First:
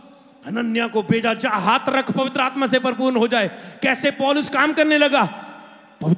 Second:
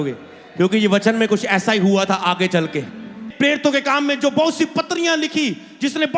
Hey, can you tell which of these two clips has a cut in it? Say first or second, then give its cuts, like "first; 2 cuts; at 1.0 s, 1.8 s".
second; 1 cut; at 3.3 s